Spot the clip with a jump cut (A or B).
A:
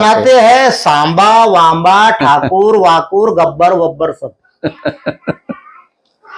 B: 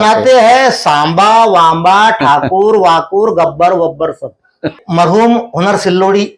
B